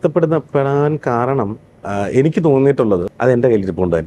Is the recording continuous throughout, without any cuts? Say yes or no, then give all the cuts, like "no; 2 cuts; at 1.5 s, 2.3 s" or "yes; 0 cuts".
no; 1 cut; at 3.1 s